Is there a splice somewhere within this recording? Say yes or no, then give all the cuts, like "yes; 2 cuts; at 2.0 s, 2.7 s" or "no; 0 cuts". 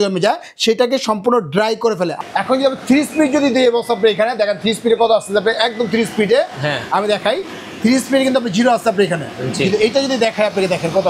yes; 1 cut; at 2.2 s